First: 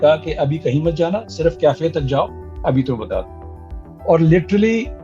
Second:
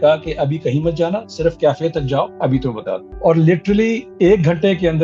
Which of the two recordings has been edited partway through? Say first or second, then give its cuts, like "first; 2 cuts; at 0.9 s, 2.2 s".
second; 2 cuts; at 2.5 s, 4.1 s